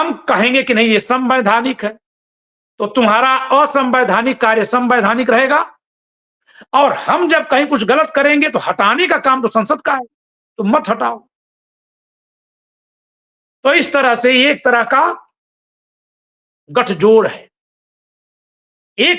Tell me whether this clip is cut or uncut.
uncut